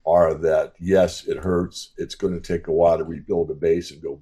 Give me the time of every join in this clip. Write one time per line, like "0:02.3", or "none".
none